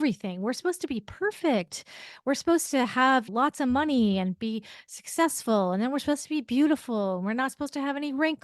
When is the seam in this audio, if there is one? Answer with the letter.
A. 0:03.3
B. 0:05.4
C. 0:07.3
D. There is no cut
A